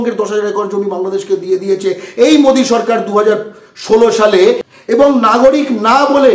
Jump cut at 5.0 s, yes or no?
yes